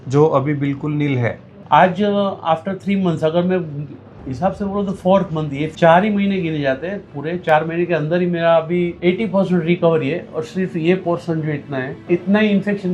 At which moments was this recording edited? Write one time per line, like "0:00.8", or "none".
0:01.5
0:05.7
0:08.9
0:11.9

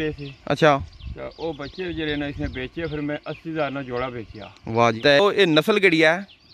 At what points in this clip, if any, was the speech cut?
0:05.0

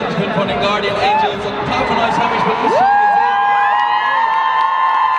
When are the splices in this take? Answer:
none

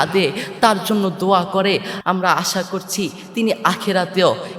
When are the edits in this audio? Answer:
0:01.9

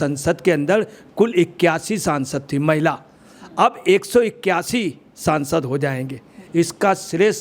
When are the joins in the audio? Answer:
0:06.4

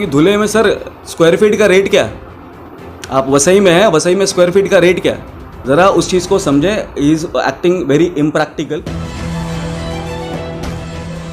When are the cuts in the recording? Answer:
0:08.8

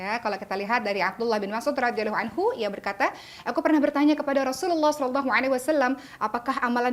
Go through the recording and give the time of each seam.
none

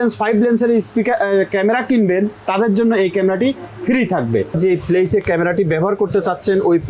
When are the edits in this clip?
0:04.6

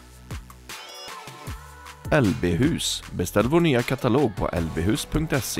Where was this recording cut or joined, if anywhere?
0:02.1

